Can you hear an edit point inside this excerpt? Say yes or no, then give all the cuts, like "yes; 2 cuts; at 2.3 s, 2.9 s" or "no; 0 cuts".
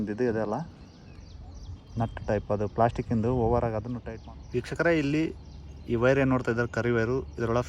yes; 1 cut; at 3.9 s